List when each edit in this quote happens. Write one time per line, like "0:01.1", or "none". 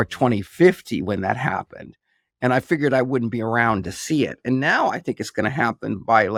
none